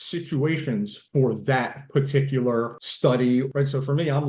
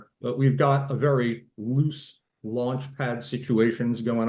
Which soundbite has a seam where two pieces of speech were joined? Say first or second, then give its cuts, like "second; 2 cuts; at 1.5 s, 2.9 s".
first; 3 cuts; at 1.0 s, 2.8 s, 3.5 s